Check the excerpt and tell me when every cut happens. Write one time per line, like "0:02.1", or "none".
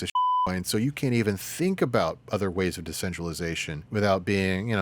0:03.7